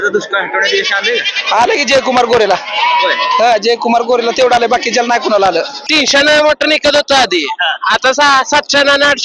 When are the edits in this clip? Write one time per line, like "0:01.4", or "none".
0:05.8